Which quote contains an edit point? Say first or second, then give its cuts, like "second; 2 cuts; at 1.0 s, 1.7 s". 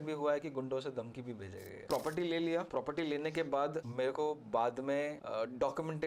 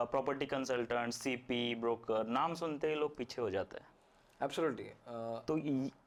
first; 4 cuts; at 1.9 s, 2.7 s, 3.8 s, 5.2 s